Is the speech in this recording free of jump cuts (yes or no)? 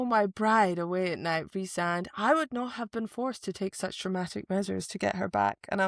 yes